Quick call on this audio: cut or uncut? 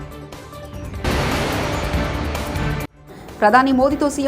cut